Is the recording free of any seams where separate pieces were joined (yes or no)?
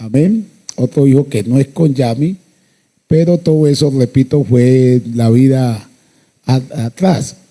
yes